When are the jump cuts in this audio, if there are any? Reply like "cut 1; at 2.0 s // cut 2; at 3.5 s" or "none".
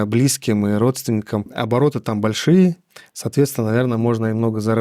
cut 1; at 1.5 s